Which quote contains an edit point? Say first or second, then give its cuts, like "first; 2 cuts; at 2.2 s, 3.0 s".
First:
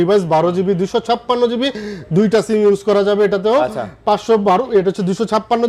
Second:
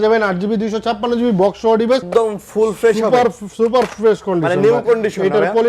second; 1 cut; at 2.1 s